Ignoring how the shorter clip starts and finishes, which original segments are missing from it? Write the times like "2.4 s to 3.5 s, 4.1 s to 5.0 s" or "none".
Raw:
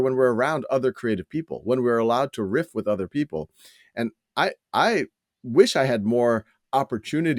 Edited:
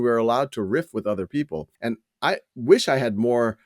4.0 s to 5.0 s